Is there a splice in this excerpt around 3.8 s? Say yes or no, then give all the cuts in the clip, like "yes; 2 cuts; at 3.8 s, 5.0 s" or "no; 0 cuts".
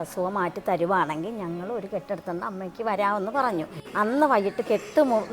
yes; 1 cut; at 3.8 s